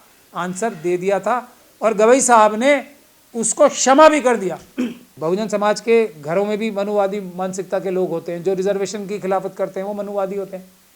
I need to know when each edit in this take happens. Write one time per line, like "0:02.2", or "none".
0:05.1